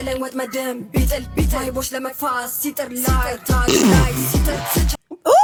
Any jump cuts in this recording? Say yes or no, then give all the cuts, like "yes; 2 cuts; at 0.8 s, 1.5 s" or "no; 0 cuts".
no; 0 cuts